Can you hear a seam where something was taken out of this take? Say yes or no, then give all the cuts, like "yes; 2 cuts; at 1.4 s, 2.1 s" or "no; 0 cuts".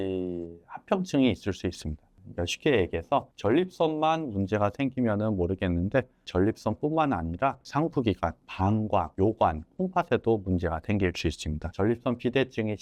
no; 0 cuts